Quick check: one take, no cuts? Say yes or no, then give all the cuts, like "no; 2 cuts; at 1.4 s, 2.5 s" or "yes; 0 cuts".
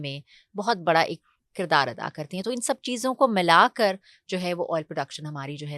yes; 0 cuts